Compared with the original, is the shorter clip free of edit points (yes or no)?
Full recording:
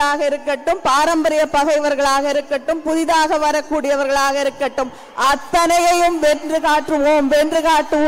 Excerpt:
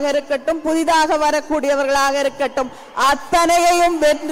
yes